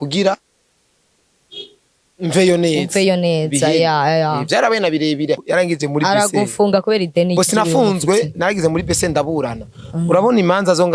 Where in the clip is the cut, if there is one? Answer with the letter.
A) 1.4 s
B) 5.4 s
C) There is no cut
B